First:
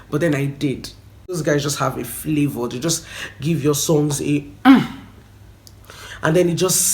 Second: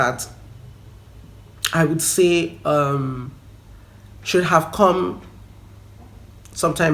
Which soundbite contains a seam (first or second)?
first